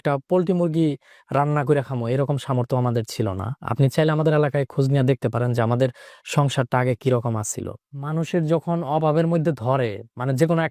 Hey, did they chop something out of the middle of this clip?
yes; 1 cut; at 7.9 s

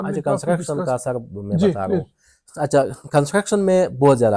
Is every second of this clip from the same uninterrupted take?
yes; 0 cuts

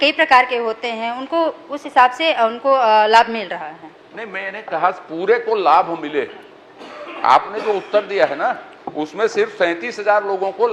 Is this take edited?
no; 0 cuts

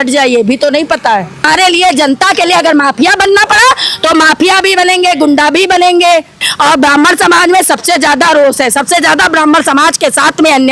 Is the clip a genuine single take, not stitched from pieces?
no; 2 cuts; at 1.5 s, 6.4 s

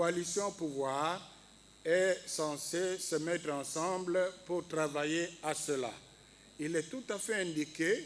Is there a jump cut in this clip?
no; 0 cuts

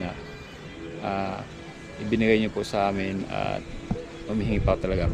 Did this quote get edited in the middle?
no; 0 cuts

